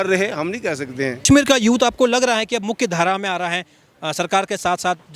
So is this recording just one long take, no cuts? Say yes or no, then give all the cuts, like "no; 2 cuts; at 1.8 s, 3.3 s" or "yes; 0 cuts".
no; 1 cut; at 1.2 s